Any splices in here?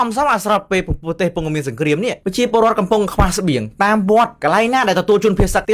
yes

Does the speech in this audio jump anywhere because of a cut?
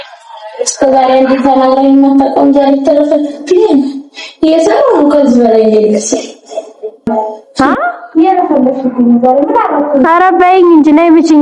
yes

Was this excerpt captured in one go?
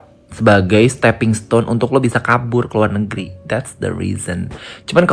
yes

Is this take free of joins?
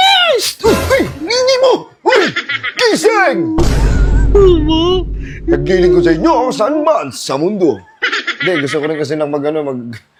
yes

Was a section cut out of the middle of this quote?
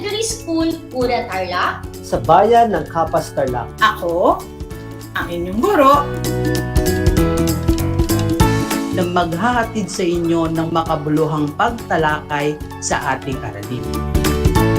no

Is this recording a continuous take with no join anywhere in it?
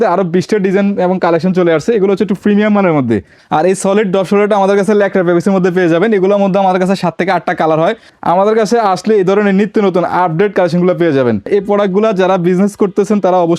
no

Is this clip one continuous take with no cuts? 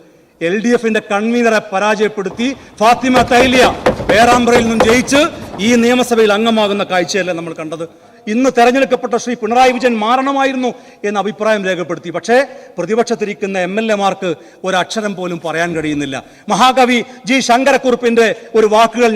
no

